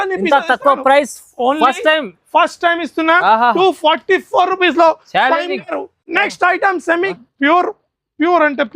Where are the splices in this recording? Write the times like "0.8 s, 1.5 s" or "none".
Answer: 7.1 s

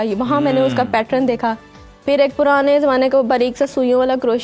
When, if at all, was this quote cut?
none

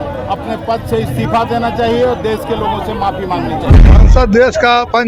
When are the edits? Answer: 3.9 s

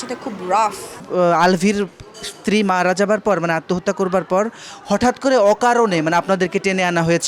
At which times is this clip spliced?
0.9 s

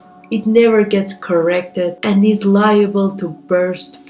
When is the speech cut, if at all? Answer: none

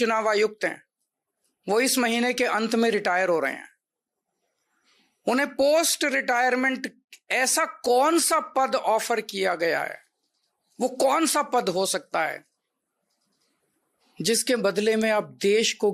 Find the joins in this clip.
none

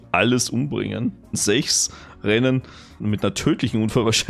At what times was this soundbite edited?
1.4 s, 3.0 s

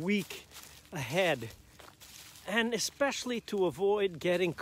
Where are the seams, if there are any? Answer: none

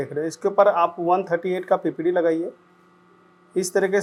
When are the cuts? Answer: none

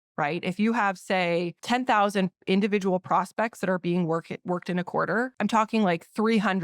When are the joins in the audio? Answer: 1.6 s, 5.3 s

